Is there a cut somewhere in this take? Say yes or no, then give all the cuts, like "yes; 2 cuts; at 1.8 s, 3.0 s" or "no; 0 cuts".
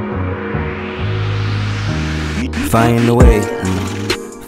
no; 0 cuts